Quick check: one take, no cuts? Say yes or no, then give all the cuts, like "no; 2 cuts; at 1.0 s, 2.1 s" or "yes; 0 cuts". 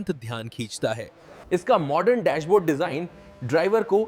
no; 1 cut; at 1.4 s